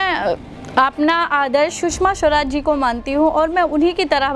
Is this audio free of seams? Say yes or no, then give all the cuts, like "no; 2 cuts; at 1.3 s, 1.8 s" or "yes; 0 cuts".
yes; 0 cuts